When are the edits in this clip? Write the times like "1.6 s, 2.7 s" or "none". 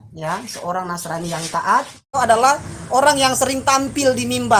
2.2 s